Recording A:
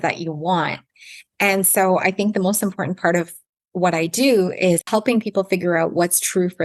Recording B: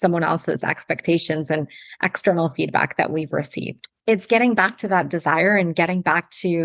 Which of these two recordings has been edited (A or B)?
A